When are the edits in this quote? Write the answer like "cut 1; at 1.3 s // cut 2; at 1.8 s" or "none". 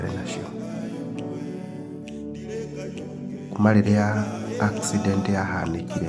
none